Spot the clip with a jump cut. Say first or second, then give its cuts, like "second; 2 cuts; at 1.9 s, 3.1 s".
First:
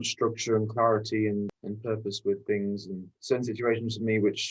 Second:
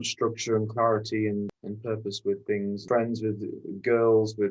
second; 1 cut; at 2.8 s